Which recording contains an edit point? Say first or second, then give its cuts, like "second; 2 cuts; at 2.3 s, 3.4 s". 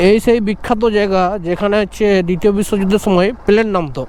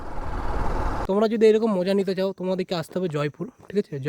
second; 1 cut; at 1.0 s